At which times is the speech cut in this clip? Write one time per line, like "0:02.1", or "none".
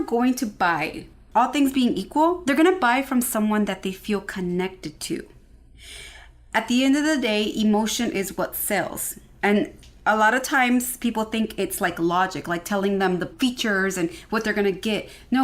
0:01.2